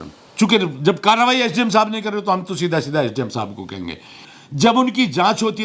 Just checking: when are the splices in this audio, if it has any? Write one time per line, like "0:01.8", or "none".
0:04.3